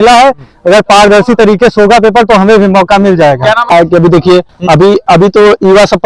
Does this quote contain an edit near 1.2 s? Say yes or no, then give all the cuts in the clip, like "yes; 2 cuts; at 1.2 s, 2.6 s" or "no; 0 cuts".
no; 1 cut; at 3.6 s